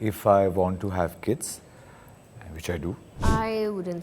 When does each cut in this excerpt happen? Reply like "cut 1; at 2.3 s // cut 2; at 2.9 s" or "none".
cut 1; at 3.1 s